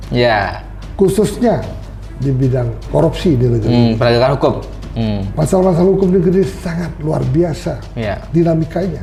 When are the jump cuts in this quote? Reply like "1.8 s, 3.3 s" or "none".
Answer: none